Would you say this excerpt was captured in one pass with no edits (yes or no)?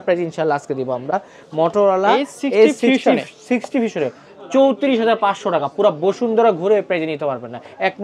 yes